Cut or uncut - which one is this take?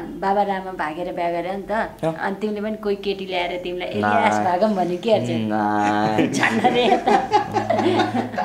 uncut